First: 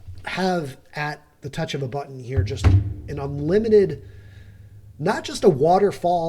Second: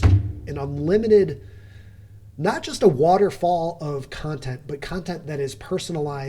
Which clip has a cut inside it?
first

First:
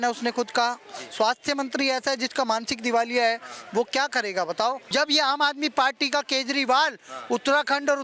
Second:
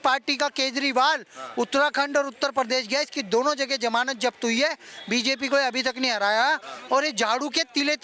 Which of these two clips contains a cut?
first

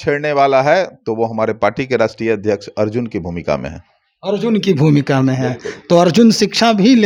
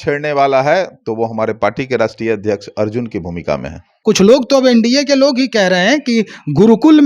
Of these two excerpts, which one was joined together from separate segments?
second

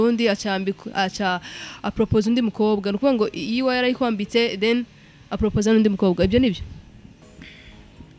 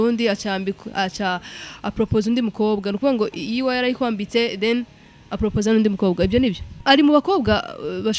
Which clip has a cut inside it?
second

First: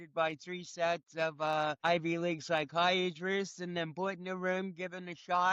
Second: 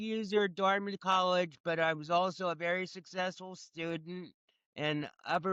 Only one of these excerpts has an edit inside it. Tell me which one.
first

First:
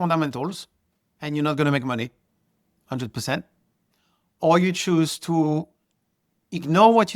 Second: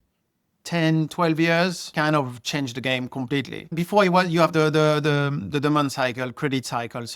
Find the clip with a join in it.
second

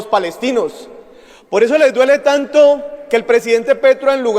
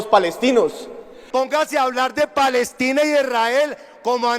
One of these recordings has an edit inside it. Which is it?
second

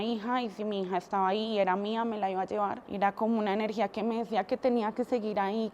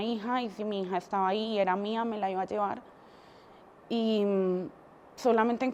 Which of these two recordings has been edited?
first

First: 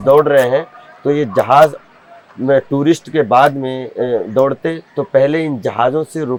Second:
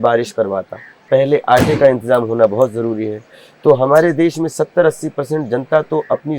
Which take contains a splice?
second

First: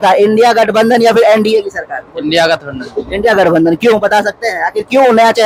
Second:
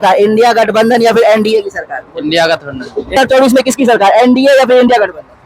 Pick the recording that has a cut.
second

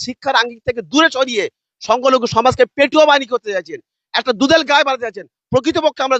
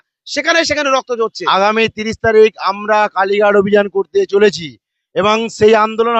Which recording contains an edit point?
second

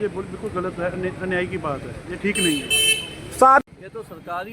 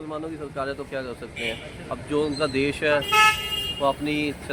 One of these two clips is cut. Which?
first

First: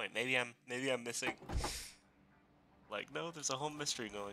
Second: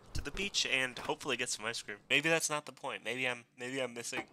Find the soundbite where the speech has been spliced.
second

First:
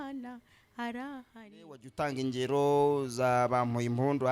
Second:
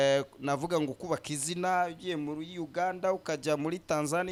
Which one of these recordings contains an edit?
first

